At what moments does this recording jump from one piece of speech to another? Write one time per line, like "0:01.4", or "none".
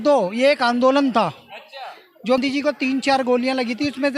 0:02.4